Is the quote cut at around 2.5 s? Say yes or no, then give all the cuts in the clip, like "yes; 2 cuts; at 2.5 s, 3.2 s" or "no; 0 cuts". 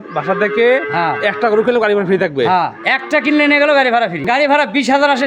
no; 1 cut; at 4.2 s